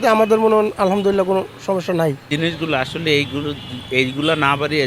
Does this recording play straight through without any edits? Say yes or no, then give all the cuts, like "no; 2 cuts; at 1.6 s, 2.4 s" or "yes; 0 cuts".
yes; 0 cuts